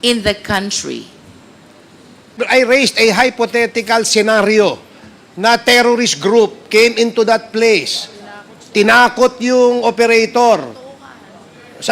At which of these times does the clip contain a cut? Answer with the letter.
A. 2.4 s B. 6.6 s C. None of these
A